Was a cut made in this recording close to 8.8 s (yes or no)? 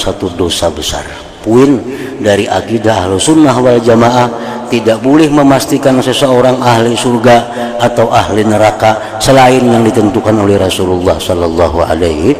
no